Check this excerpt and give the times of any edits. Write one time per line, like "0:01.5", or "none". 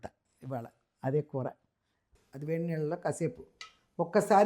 0:02.2